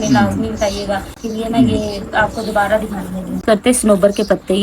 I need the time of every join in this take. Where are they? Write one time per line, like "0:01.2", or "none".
0:01.3
0:03.4